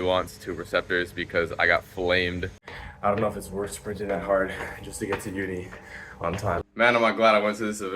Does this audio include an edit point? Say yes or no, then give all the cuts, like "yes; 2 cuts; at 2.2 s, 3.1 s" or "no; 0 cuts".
yes; 2 cuts; at 2.7 s, 6.6 s